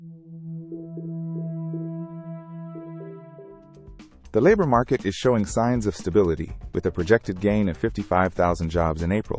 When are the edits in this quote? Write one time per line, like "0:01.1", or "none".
0:03.7

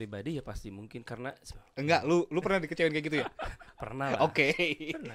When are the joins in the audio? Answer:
0:01.4

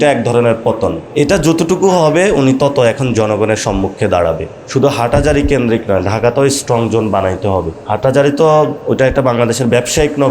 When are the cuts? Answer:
0:01.0
0:04.5
0:07.8
0:08.8

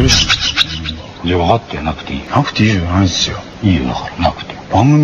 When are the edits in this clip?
0:02.1
0:03.4

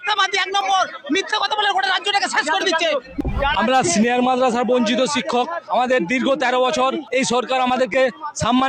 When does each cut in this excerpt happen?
0:03.1
0:05.6
0:07.0

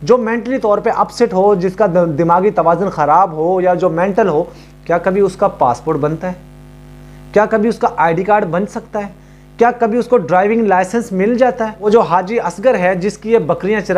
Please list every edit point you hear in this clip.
0:11.8

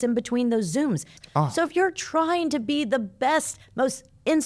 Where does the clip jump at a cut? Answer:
0:01.1

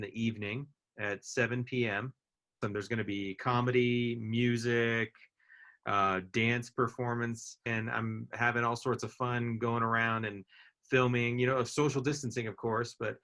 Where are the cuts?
0:02.6
0:07.7

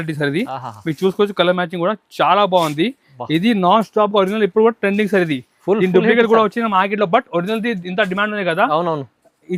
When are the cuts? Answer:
none

